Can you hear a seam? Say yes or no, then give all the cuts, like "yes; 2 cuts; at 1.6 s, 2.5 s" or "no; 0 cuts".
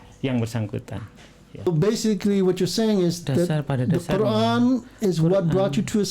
yes; 1 cut; at 1.7 s